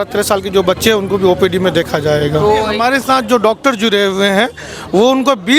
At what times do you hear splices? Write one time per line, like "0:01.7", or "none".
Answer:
0:02.7